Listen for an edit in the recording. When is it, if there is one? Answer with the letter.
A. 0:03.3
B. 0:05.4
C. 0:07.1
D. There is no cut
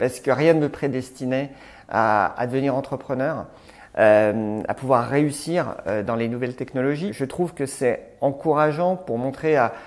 C